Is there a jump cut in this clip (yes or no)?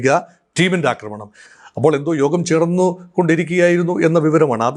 no